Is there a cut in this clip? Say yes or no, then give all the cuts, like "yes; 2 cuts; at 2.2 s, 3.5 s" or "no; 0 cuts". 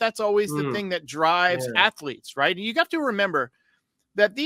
no; 0 cuts